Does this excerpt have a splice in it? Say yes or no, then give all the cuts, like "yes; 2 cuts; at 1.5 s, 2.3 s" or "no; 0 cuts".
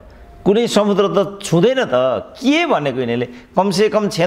no; 0 cuts